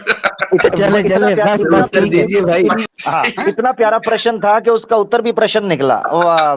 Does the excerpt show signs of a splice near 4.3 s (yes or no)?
no